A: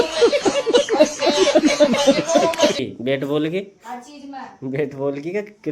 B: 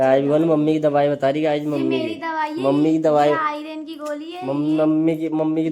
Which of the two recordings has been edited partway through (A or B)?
A